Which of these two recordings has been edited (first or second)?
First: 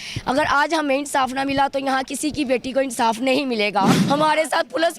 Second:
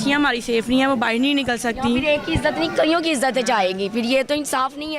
first